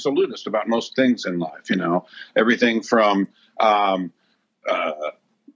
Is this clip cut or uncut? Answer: uncut